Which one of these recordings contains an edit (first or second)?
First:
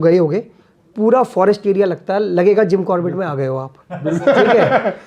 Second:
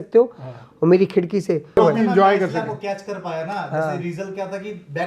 second